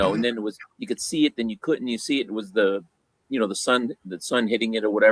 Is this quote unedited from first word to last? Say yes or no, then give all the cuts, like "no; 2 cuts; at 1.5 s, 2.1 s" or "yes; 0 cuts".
yes; 0 cuts